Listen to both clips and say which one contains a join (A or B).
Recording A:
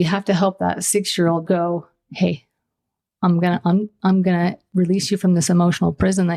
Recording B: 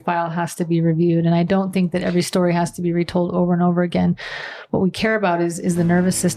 A